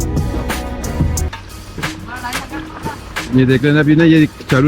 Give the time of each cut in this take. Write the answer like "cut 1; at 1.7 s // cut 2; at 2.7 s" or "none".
cut 1; at 1.2 s